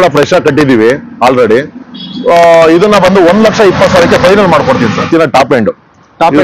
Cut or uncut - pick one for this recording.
cut